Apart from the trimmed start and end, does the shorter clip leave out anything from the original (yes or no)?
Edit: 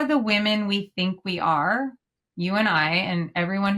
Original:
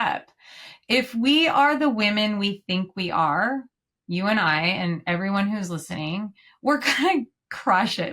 no